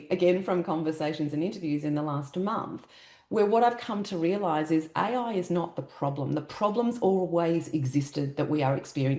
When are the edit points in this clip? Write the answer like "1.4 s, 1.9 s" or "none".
none

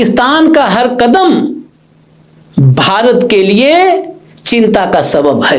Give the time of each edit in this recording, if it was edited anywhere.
none

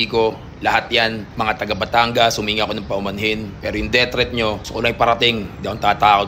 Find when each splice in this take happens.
1.2 s, 3.5 s, 4.6 s

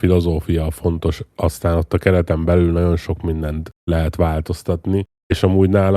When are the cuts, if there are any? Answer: 3.7 s, 5.1 s

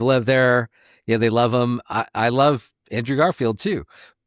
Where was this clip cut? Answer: none

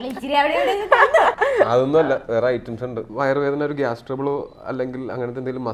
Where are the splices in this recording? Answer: 1.4 s, 3.1 s

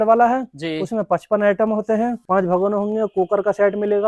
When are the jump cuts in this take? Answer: 2.2 s

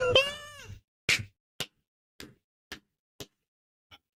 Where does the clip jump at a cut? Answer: none

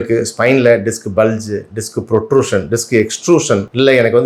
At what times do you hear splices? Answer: none

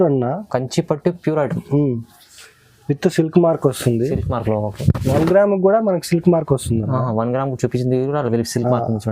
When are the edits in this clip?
none

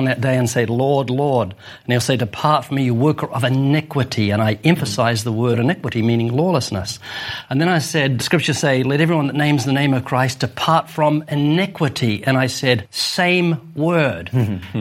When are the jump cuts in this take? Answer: 5.6 s, 8.2 s, 13.0 s

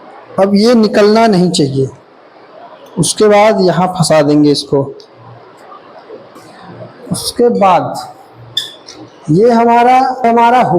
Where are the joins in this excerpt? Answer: 6.4 s

